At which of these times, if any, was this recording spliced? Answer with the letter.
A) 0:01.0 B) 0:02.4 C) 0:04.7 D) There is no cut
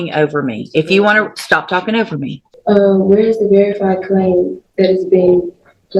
B